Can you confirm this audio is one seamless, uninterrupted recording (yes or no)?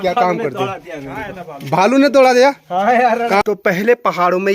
no